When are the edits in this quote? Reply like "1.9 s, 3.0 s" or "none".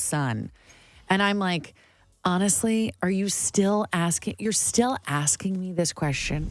none